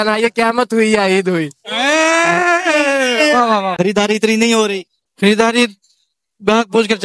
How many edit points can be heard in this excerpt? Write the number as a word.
one